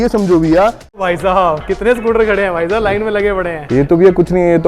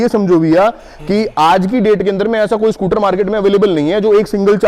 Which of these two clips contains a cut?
first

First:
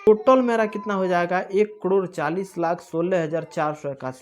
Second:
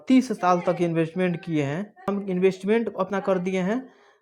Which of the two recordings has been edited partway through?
second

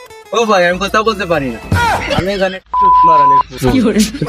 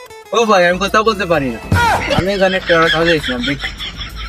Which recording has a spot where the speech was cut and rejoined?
first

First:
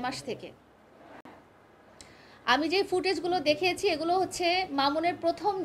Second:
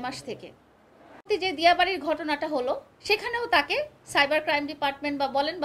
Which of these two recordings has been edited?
second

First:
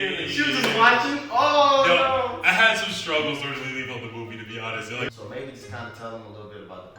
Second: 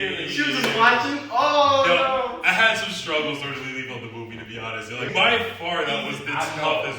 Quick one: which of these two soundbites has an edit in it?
first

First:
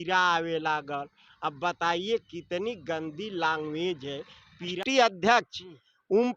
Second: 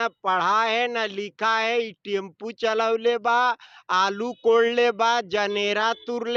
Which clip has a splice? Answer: first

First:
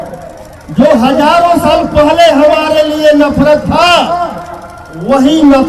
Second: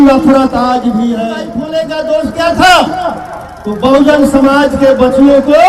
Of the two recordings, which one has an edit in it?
second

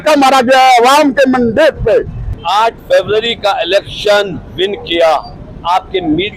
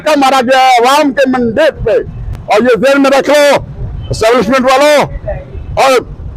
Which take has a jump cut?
first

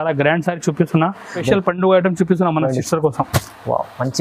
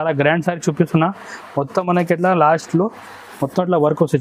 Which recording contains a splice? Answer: first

